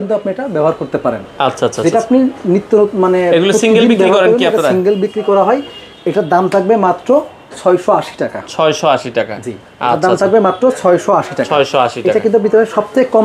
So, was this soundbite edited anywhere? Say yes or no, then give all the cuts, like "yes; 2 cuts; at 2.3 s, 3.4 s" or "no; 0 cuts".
no; 0 cuts